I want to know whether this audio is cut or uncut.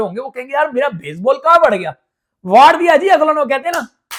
uncut